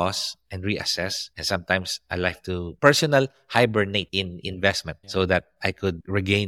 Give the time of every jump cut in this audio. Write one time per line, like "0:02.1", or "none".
none